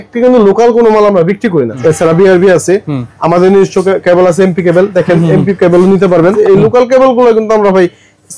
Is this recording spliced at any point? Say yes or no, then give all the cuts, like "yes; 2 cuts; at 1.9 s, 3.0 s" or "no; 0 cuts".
yes; 2 cuts; at 1.7 s, 6.4 s